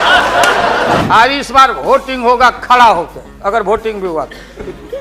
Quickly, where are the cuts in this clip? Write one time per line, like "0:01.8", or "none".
0:01.0